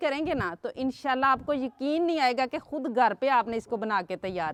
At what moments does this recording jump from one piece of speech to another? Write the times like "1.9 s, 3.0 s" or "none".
none

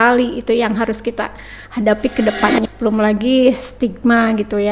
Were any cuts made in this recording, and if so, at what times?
2.7 s

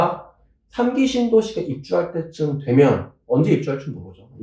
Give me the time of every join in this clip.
none

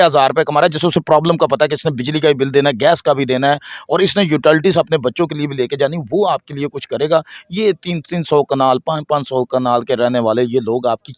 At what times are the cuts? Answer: none

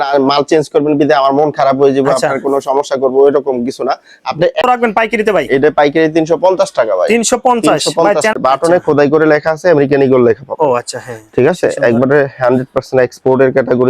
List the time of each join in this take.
4.6 s, 8.3 s

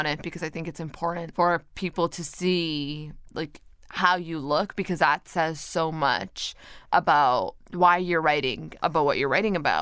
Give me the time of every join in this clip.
1.3 s, 3.3 s, 6.8 s, 8.7 s

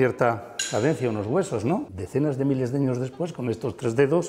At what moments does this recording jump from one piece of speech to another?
2.0 s

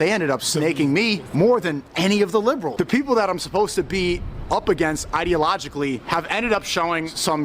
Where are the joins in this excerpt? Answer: 2.7 s

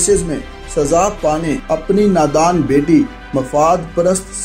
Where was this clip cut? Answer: 1.6 s

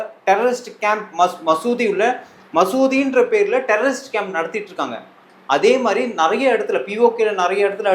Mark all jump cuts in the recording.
none

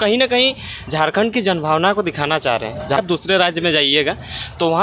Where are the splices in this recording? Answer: 3.0 s

